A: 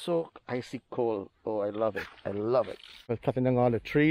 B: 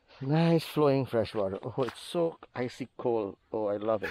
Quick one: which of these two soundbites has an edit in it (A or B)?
A